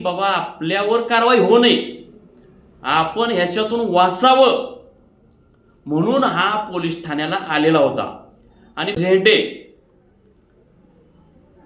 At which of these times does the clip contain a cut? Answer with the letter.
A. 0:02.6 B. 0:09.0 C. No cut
B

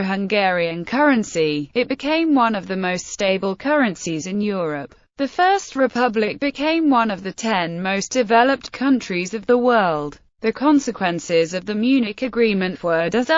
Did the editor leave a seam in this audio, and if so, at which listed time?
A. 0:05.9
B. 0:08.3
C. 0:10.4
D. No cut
A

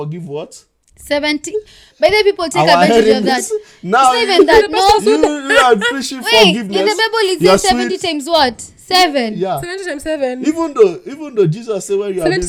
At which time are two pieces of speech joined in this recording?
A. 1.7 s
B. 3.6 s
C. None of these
C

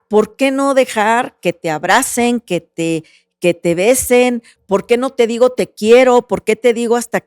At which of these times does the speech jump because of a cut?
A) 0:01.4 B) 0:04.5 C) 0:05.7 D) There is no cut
B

